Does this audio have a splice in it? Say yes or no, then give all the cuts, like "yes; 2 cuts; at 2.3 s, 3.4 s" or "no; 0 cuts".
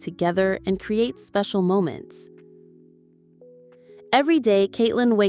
yes; 2 cuts; at 2.0 s, 4.1 s